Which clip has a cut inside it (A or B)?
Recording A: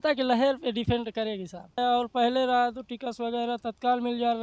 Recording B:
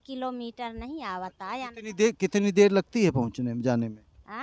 A